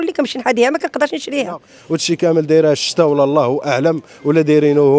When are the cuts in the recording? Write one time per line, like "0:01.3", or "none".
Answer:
0:01.7